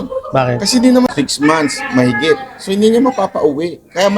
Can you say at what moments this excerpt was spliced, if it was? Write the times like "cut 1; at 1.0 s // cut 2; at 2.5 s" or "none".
cut 1; at 1.1 s